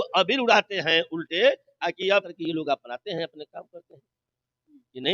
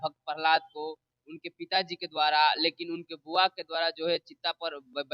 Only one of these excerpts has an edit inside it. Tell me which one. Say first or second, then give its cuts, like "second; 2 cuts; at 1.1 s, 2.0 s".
first; 1 cut; at 2.3 s